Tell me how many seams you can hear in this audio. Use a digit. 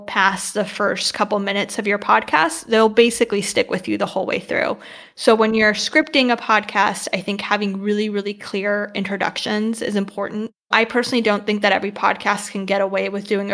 1